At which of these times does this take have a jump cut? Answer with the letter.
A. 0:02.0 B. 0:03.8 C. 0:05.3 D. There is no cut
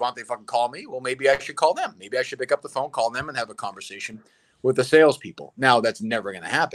D